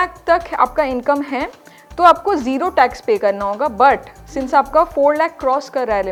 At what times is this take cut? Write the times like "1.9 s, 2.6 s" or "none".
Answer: none